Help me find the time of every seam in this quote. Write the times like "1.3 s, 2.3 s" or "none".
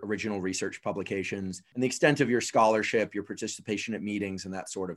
1.6 s